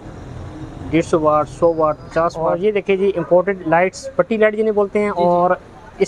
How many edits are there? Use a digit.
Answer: 1